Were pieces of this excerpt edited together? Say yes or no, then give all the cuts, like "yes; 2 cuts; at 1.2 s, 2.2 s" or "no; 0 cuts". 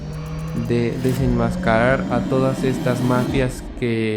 no; 0 cuts